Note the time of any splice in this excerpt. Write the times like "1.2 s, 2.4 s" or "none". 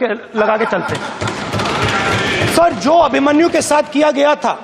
none